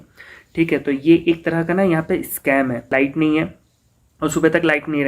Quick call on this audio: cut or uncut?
cut